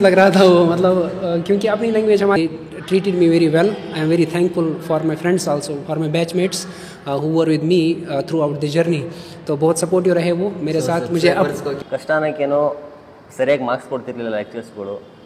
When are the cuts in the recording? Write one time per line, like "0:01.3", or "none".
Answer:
0:02.4
0:11.7